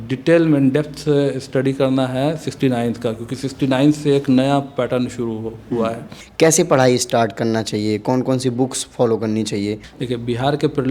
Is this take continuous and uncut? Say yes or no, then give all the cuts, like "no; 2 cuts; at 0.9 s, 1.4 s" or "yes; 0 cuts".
no; 2 cuts; at 6.2 s, 9.9 s